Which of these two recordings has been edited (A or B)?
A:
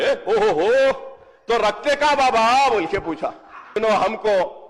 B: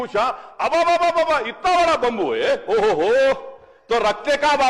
A